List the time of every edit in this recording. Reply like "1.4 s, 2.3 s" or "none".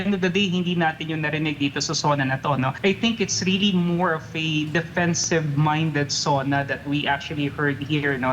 2.7 s